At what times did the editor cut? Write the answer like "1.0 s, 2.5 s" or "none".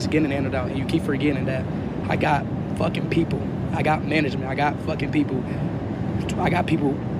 none